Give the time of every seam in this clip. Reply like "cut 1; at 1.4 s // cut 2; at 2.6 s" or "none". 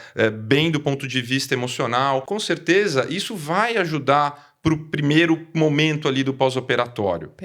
cut 1; at 2.3 s